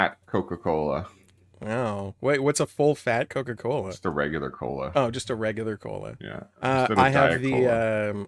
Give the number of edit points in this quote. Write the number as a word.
zero